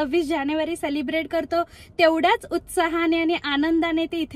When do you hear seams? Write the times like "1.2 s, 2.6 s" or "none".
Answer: none